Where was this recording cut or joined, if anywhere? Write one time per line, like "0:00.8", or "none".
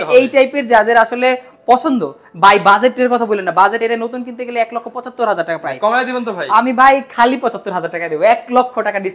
none